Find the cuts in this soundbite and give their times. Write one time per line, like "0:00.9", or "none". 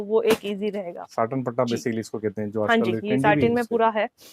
0:01.0

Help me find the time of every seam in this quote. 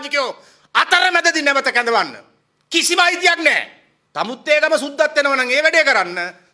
0:04.0

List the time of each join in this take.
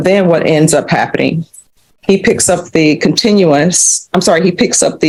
none

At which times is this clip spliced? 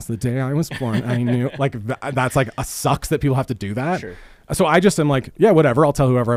none

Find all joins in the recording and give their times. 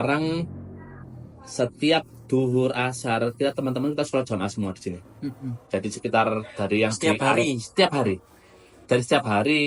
none

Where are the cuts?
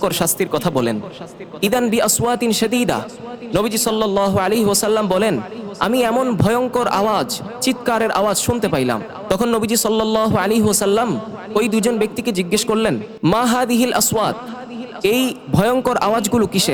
none

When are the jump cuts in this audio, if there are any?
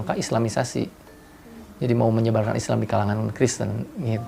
none

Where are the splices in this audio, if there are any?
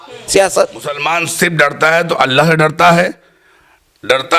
0:01.0

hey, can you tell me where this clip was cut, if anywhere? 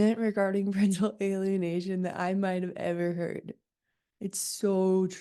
none

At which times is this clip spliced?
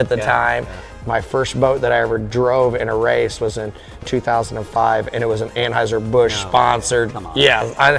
0:01.0
0:04.1

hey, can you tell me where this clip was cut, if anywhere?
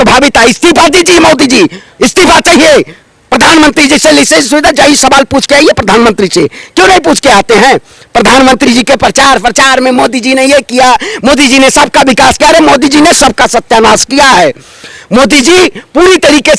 none

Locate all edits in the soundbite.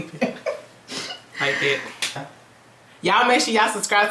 0:02.3

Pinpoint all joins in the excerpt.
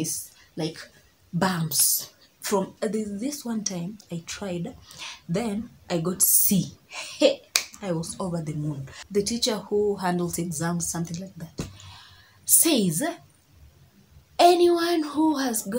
0:02.7
0:08.9

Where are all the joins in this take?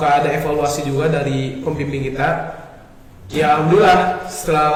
none

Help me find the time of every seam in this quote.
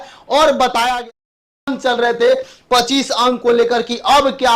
0:01.0

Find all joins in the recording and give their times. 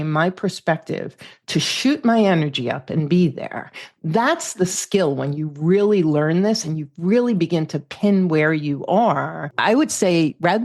0:09.5

